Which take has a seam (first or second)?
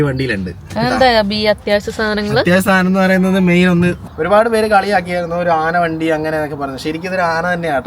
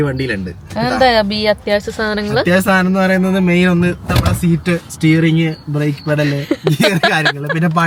first